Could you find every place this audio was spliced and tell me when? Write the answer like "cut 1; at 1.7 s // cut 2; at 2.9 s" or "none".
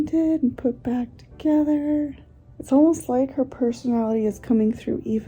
none